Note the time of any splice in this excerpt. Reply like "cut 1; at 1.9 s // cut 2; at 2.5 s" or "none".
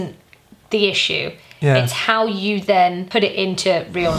cut 1; at 3.0 s